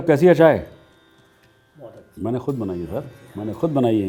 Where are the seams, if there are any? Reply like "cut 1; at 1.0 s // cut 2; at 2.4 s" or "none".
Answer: none